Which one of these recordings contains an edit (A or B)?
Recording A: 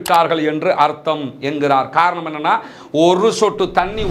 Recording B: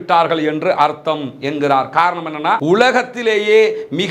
B